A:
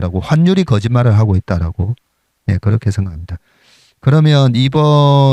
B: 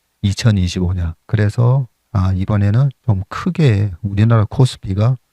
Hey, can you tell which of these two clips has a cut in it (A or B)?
B